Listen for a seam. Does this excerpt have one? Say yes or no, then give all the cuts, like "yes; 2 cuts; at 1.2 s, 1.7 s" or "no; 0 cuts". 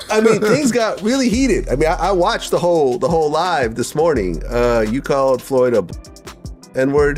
no; 0 cuts